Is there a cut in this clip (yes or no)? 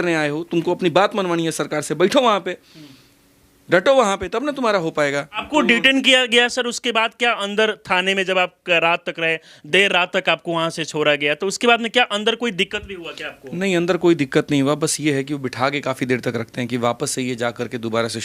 no